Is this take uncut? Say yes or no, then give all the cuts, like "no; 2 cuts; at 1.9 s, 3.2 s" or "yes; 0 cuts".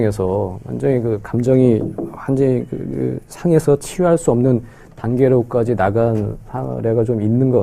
yes; 0 cuts